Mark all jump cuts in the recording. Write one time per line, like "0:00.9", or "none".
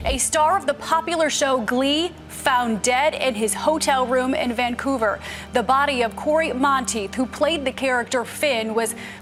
none